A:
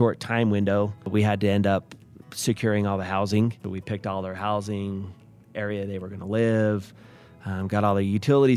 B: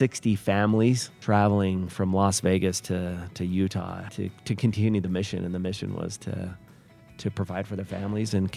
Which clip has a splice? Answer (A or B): B